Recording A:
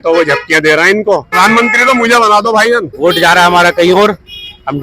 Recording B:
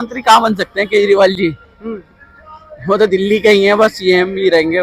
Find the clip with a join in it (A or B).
A